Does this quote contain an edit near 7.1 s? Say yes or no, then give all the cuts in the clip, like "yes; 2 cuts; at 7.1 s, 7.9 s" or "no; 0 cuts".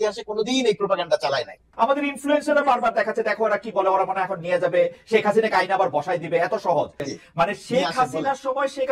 yes; 2 cuts; at 1.6 s, 7.1 s